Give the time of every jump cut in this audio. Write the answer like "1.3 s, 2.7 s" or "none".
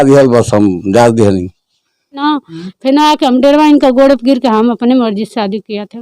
2.2 s